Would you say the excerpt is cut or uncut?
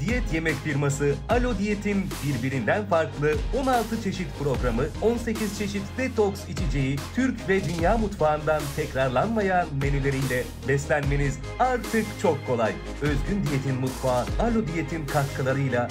uncut